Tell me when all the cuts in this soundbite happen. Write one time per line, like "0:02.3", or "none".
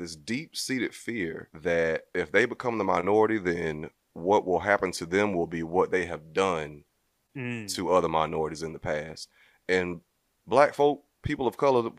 0:01.5
0:02.1